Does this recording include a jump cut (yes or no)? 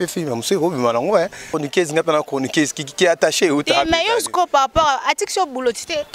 yes